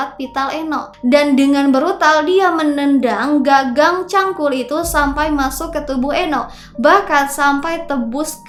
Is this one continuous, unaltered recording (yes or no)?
yes